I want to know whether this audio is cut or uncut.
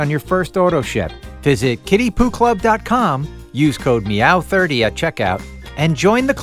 uncut